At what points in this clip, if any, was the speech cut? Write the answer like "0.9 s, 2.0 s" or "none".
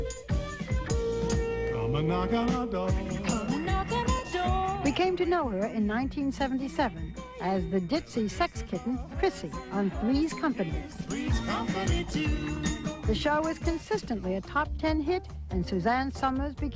15.1 s

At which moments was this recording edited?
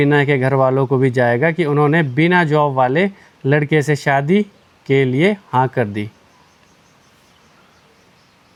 none

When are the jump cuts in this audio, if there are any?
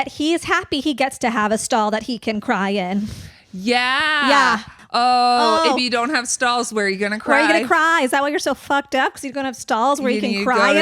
4.7 s

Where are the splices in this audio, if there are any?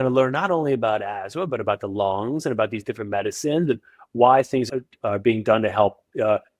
4.7 s

